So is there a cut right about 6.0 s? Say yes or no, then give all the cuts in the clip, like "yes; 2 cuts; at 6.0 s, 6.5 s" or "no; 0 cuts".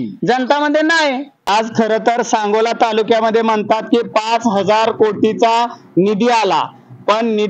no; 1 cut; at 1.5 s